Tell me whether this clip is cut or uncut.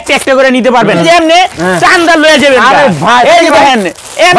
cut